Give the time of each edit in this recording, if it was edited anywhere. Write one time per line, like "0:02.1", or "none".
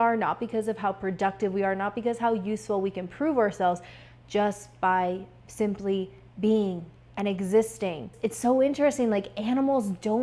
0:08.1